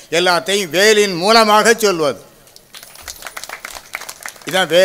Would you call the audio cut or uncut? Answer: uncut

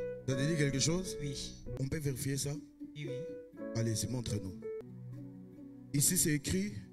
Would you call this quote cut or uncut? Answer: cut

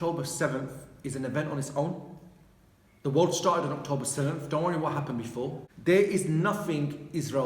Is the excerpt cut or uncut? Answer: cut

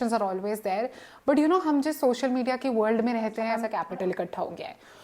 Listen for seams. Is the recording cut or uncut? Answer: cut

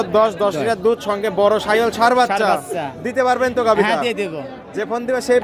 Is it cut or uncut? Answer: uncut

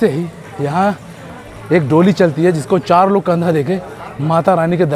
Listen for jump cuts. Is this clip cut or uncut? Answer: uncut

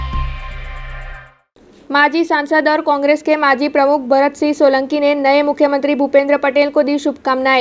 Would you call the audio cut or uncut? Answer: cut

